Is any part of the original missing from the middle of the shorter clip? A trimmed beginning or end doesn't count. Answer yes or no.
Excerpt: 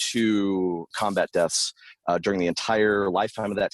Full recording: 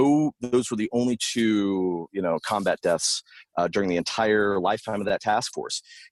yes